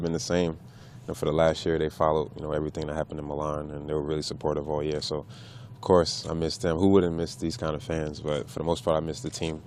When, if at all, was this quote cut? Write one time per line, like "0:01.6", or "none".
0:01.0